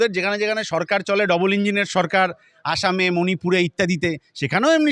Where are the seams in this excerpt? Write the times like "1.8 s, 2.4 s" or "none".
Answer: none